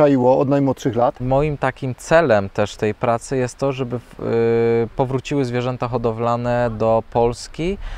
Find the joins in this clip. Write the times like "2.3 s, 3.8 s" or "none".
1.2 s